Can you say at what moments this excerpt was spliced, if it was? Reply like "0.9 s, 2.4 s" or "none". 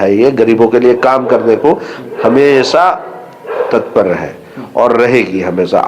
none